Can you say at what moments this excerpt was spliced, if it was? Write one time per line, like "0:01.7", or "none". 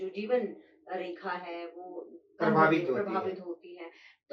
none